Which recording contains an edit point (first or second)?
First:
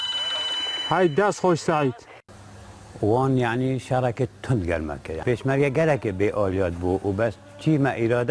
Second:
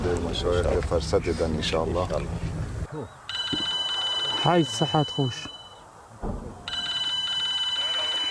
first